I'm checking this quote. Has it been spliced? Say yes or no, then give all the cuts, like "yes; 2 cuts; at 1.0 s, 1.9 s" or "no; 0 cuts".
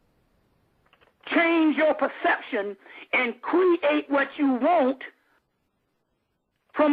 yes; 1 cut; at 5.0 s